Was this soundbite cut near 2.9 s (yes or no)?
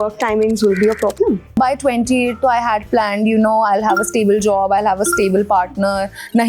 no